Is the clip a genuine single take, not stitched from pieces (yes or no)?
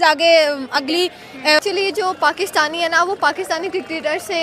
no